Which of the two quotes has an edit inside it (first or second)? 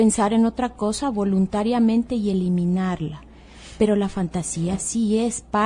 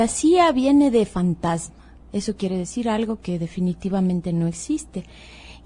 second